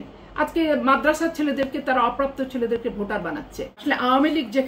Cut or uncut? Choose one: cut